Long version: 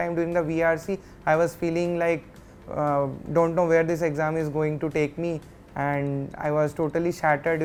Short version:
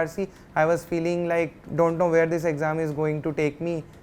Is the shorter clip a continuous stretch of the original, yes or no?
no